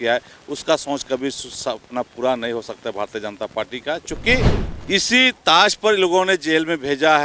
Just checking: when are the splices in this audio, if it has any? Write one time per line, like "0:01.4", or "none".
0:04.7